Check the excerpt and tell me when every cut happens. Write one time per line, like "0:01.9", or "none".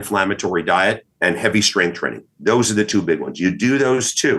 0:01.1